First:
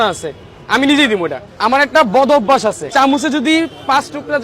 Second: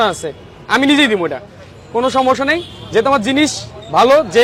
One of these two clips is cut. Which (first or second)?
first